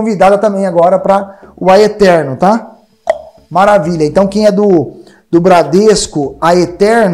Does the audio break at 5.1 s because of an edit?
no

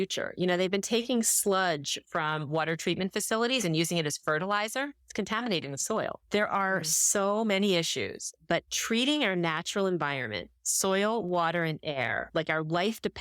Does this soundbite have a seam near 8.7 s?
yes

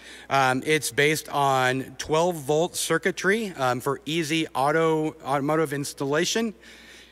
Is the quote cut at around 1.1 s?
no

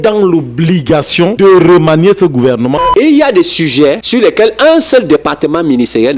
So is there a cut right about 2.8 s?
yes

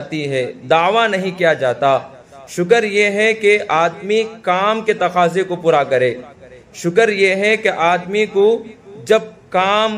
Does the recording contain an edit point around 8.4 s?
no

